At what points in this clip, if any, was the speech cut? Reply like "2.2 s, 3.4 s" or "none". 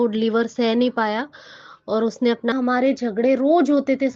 2.5 s